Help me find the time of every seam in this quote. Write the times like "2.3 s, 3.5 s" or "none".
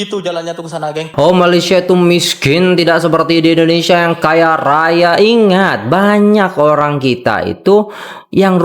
1.1 s